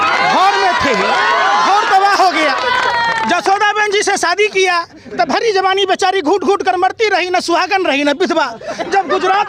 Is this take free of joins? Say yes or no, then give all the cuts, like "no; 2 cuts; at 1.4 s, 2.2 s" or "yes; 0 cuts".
yes; 0 cuts